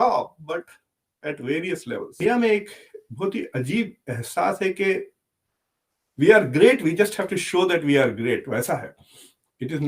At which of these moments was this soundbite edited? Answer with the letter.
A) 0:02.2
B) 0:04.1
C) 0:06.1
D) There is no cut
A